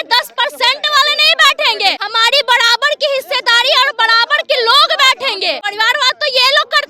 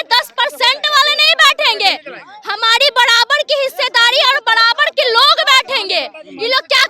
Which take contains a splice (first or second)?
first